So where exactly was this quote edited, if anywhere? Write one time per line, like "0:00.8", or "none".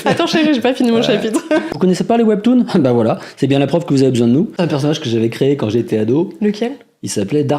0:01.7
0:04.6